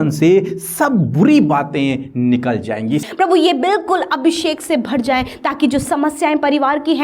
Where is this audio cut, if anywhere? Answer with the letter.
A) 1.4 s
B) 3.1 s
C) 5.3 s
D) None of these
B